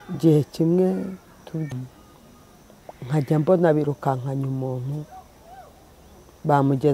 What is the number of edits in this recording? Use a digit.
1